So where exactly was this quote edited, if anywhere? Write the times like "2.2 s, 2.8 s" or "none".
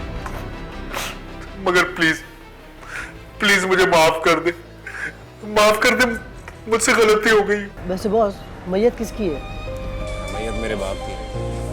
7.7 s